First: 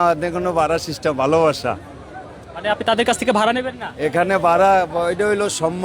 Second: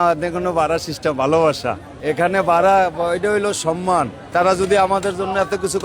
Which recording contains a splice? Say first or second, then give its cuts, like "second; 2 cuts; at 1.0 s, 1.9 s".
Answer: second; 2 cuts; at 1.9 s, 4.2 s